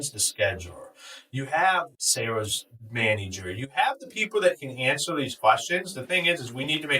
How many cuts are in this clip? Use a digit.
1